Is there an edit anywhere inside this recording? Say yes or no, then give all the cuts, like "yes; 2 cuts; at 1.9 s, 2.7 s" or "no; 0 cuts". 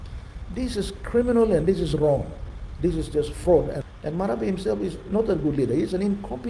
yes; 1 cut; at 3.8 s